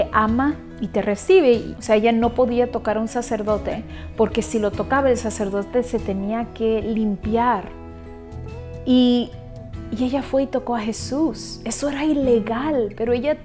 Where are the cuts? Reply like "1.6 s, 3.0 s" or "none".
1.7 s